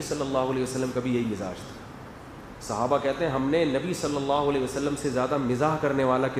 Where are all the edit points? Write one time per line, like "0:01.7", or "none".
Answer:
none